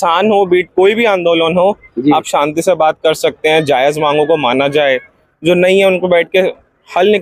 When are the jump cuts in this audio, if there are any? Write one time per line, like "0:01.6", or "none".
none